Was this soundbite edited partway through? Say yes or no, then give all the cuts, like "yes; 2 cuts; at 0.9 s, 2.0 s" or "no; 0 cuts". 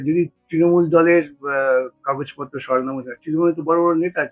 no; 0 cuts